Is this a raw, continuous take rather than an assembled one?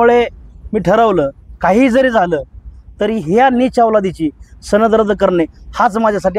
yes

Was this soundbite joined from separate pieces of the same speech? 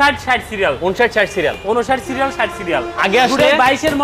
no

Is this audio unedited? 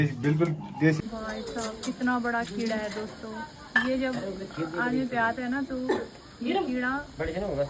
no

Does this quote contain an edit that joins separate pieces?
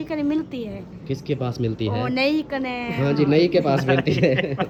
no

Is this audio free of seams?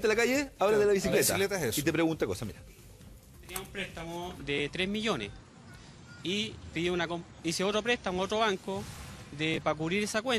no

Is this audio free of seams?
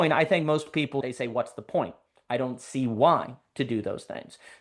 no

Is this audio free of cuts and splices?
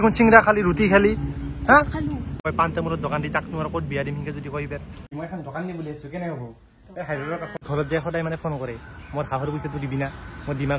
no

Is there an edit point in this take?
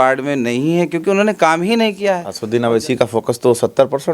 yes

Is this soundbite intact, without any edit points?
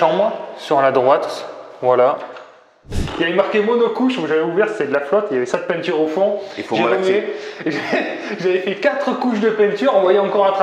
no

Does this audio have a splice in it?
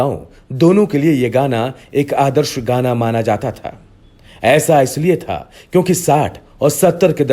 no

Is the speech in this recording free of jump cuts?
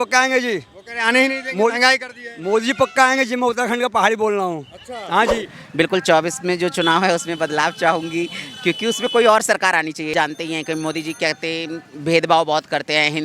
no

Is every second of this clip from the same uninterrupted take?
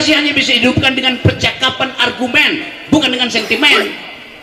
yes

